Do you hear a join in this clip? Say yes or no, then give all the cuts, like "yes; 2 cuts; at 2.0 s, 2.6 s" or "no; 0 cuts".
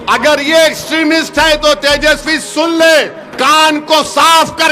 yes; 1 cut; at 3.2 s